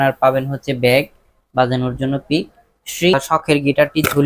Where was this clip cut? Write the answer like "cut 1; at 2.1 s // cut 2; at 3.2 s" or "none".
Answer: cut 1; at 3.1 s